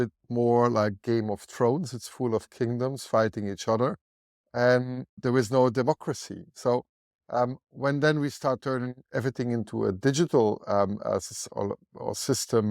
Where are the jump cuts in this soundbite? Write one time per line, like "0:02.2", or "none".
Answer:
0:05.2